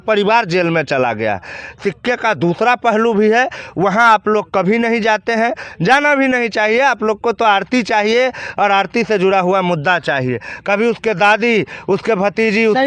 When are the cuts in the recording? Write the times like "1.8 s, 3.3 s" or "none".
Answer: none